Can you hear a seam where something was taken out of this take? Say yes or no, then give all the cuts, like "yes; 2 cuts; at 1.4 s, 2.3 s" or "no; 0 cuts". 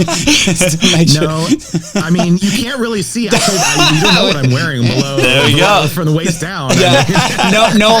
no; 0 cuts